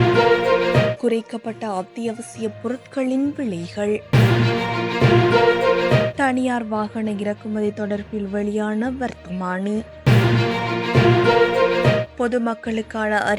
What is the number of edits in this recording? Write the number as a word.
five